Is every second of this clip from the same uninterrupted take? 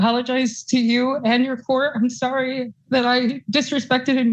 yes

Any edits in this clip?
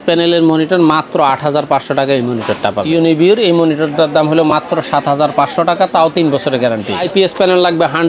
yes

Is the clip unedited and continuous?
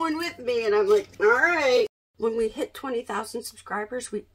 no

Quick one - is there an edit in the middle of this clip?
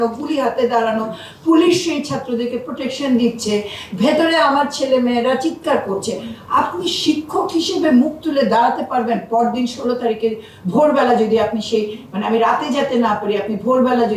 no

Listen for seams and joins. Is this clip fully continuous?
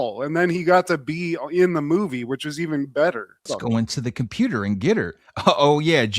no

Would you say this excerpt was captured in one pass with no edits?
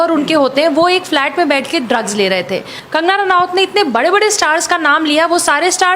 no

